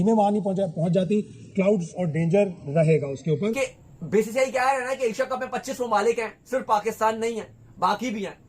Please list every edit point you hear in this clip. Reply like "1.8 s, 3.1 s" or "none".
3.6 s